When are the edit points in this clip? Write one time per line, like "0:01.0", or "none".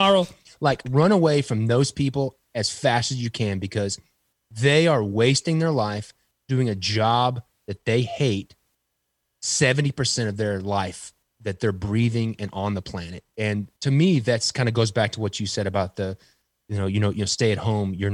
0:13.5